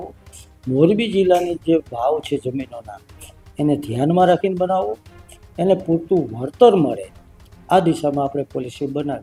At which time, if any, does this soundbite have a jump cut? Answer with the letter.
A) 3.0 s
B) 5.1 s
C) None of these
C